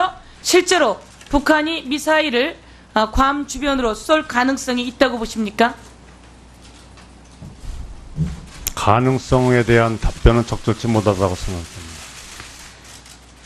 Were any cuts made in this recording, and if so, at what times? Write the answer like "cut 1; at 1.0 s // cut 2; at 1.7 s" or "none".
cut 1; at 8.3 s